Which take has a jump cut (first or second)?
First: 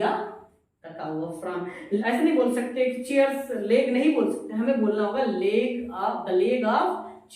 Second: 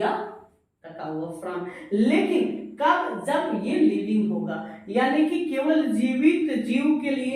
first